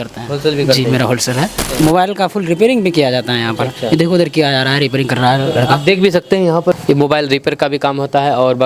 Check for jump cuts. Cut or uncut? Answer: cut